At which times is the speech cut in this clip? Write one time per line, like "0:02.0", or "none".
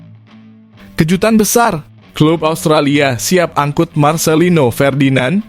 0:01.0

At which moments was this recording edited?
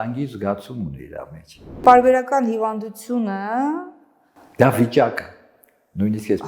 0:01.8

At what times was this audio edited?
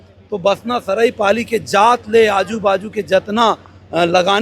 none

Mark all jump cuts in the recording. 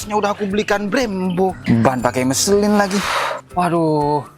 0:01.6
0:03.4

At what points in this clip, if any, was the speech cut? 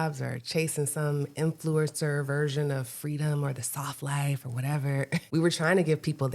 0:05.2

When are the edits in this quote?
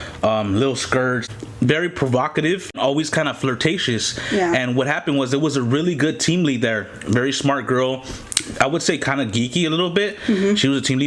0:01.2
0:02.7

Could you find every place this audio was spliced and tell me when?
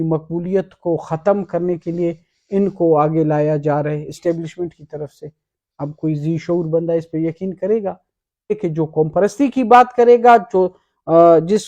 0:08.6

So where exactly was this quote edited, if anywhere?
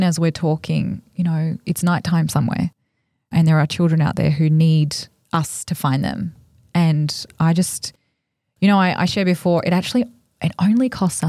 none

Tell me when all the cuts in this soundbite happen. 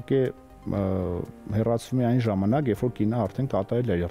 none

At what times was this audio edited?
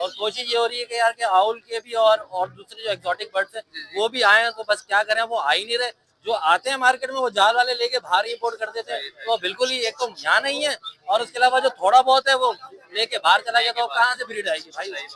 none

